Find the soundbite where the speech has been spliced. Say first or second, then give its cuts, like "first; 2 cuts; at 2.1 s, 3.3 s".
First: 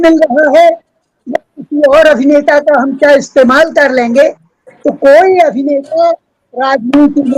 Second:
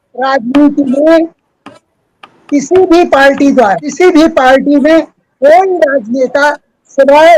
second; 1 cut; at 3.8 s